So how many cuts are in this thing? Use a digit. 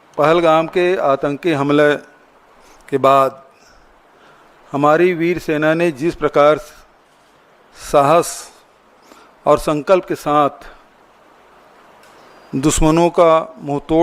1